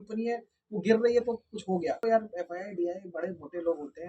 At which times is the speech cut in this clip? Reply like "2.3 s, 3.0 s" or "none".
2.0 s